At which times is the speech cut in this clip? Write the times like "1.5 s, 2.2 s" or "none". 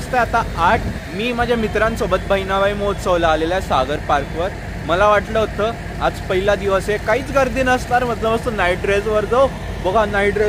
none